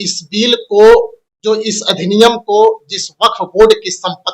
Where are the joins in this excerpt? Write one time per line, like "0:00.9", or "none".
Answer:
0:01.2